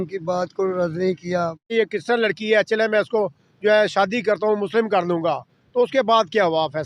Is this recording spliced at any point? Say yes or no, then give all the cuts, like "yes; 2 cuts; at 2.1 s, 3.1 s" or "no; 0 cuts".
yes; 1 cut; at 1.7 s